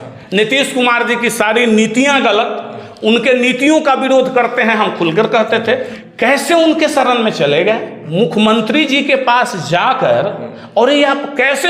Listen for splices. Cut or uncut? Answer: cut